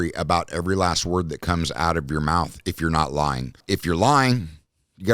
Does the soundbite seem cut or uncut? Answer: cut